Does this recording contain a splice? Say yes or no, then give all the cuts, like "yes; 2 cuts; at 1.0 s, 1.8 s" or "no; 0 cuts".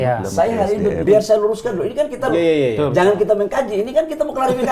yes; 1 cut; at 1.1 s